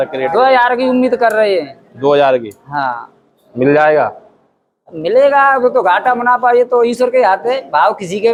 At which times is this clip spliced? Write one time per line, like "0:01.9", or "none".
none